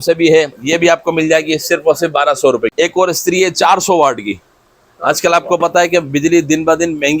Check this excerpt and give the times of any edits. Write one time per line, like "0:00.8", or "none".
0:02.7